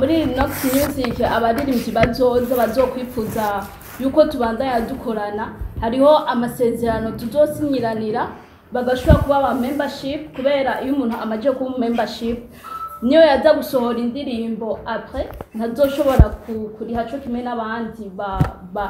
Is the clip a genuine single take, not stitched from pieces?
yes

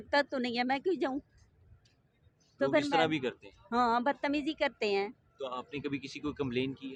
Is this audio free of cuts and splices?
yes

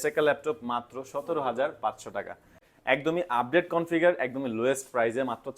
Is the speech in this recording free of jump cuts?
no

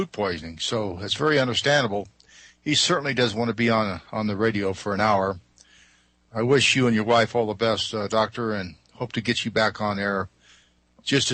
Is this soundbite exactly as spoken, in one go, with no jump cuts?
yes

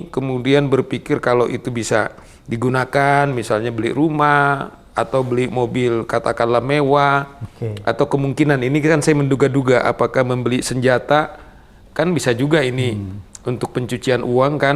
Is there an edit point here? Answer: no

